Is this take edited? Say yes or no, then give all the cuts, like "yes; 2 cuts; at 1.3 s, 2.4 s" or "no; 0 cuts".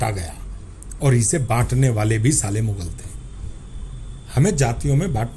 no; 0 cuts